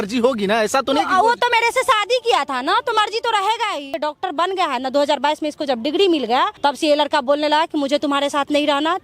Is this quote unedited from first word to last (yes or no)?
no